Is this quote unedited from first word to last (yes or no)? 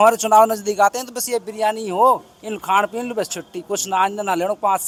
yes